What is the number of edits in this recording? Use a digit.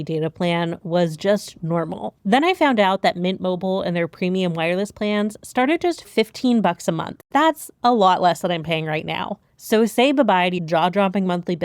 3